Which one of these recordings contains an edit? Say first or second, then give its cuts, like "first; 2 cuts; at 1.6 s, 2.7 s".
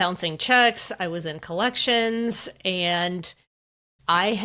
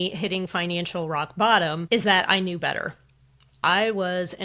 second; 1 cut; at 1.8 s